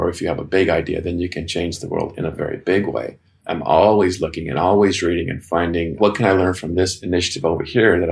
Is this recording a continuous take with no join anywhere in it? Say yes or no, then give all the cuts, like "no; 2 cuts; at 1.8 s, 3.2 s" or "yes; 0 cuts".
yes; 0 cuts